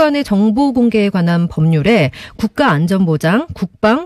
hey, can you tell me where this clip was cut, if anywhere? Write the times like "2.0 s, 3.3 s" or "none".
1.1 s